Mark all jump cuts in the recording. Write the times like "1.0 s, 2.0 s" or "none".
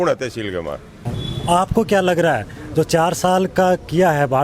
1.1 s